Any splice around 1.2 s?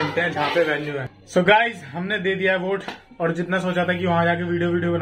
yes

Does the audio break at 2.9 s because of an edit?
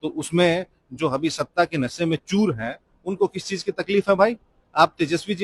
no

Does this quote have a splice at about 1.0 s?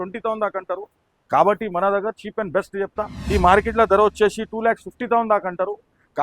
no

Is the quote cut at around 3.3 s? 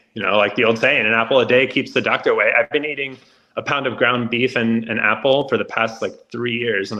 no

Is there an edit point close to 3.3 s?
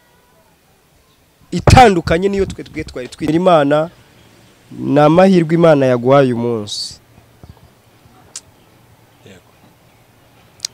yes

